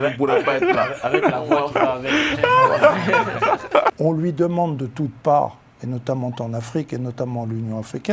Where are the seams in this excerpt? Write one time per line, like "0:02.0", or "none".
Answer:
0:04.0